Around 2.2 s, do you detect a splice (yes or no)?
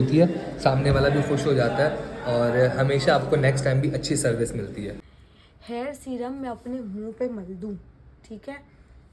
no